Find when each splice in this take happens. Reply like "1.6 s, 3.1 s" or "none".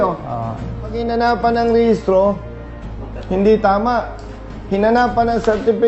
1.0 s